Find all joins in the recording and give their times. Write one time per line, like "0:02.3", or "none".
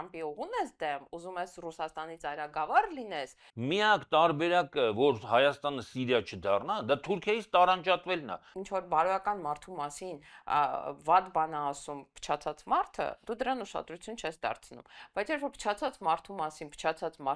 0:03.5
0:08.5